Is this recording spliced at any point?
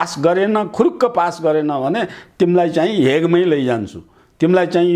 no; 0 cuts

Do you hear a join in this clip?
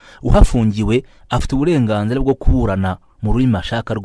no; 0 cuts

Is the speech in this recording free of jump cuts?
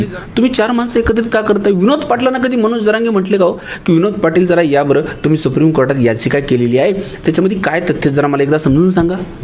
yes; 0 cuts

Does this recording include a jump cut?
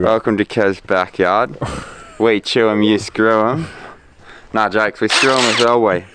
no; 0 cuts

